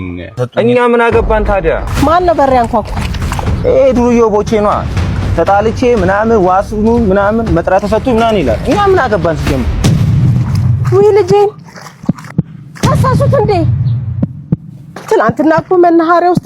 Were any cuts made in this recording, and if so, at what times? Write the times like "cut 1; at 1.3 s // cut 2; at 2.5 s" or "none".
cut 1; at 1.9 s